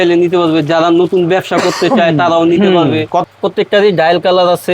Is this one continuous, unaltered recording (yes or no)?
no